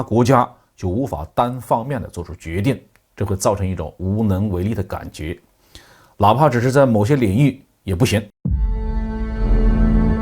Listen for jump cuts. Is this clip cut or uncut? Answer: cut